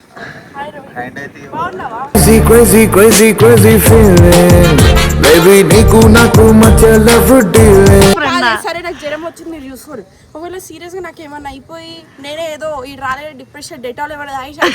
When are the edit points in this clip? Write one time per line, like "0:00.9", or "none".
0:08.2